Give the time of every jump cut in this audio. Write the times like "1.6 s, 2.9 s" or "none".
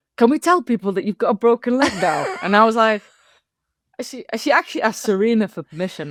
none